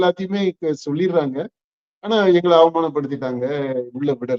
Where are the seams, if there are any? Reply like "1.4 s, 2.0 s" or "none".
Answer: none